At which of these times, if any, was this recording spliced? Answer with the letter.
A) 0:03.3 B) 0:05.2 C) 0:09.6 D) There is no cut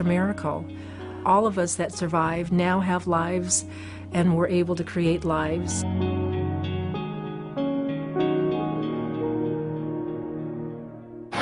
D